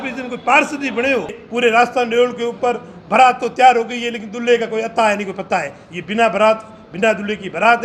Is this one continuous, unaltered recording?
no; 1 cut; at 1.4 s

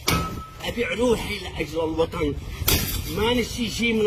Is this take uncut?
yes; 0 cuts

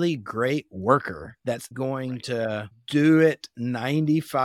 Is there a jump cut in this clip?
yes; 2 cuts; at 1.7 s, 2.8 s

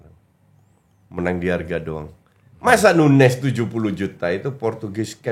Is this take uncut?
yes; 0 cuts

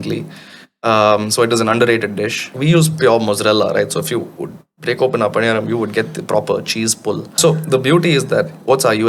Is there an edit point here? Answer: yes; 2 cuts; at 2.6 s, 7.3 s

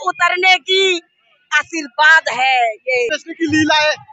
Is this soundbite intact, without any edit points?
no; 1 cut; at 3.2 s

